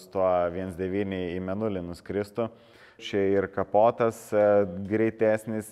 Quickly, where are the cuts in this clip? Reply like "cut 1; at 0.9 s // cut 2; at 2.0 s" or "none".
cut 1; at 3.0 s